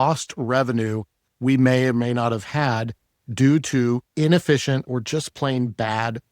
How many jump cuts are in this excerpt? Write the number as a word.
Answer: one